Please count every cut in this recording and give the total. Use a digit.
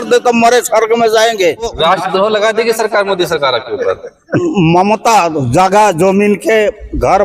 2